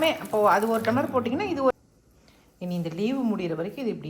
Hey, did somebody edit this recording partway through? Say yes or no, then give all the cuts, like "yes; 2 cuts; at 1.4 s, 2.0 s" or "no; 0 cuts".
yes; 1 cut; at 1.7 s